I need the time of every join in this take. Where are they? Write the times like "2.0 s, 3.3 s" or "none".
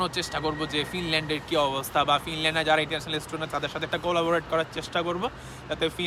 none